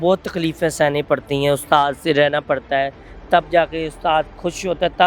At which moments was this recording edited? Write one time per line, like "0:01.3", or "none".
none